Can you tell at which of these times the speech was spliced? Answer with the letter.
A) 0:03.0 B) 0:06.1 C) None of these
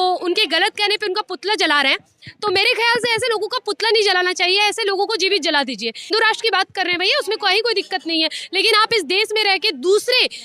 B